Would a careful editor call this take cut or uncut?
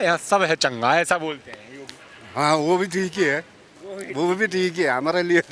uncut